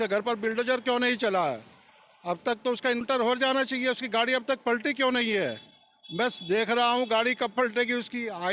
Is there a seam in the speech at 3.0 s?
yes; 1 cut; at 3.0 s

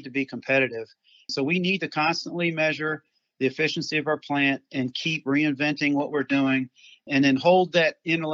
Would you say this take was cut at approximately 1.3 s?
yes; 1 cut; at 1.3 s

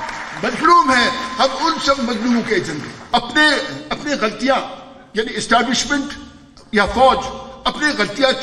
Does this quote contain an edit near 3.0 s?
yes; 1 cut; at 3.0 s

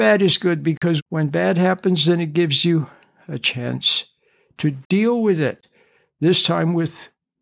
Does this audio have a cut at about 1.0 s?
yes; 1 cut; at 1.0 s

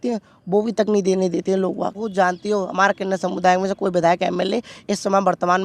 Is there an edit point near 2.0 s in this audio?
yes; 1 cut; at 2.0 s

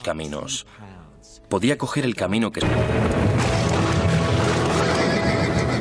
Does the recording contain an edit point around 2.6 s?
no; 0 cuts

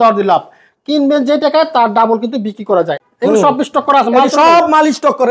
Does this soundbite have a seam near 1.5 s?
no; 1 cut; at 3.0 s

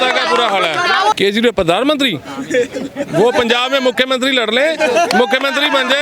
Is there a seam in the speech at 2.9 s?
no; 1 cut; at 1.1 s

